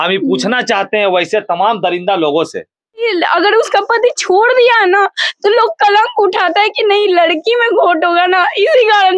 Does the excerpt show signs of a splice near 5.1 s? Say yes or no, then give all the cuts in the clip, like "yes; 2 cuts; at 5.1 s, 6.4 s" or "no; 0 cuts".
no; 1 cut; at 3.1 s